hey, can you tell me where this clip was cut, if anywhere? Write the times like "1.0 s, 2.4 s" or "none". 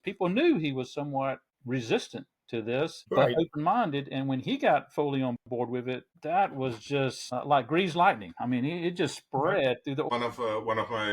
10.1 s